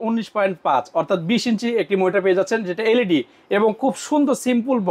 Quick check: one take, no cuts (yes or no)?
yes